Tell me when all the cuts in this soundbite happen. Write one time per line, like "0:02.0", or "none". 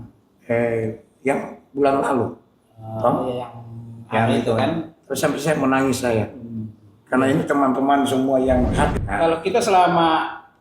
0:08.9